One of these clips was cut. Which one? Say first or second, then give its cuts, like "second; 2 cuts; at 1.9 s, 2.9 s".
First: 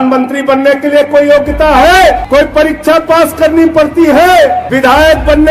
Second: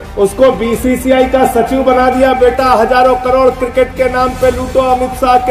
first; 2 cuts; at 2.2 s, 4.7 s